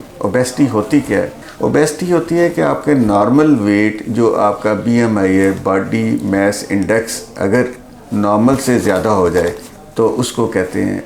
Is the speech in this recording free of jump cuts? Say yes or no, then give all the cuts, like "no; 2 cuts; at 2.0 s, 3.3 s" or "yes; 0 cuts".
yes; 0 cuts